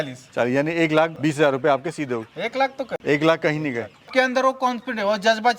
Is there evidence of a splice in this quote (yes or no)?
yes